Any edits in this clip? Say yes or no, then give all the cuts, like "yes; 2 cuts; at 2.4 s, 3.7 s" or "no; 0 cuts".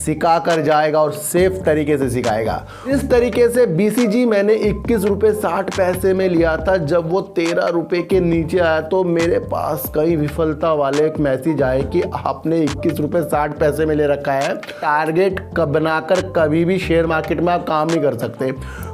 yes; 2 cuts; at 2.9 s, 14.8 s